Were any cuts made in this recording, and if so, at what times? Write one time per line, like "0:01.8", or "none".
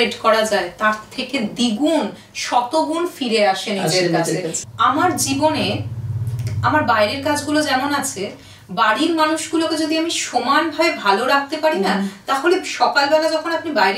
0:04.6